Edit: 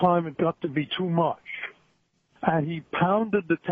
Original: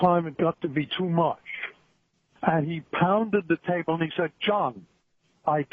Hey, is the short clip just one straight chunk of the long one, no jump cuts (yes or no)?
yes